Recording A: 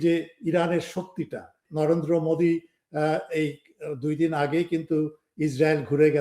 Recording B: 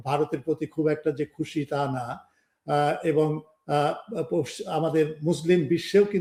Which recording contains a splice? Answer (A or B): A